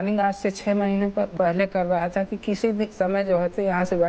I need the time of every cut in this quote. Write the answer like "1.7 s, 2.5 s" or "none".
1.3 s